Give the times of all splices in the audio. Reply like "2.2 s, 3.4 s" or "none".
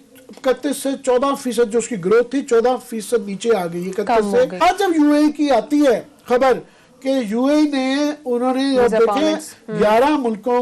4.6 s